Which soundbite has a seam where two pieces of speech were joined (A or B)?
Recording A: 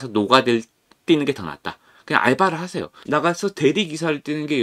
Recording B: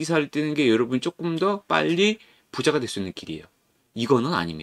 A